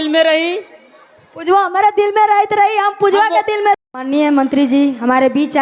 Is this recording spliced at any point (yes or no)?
yes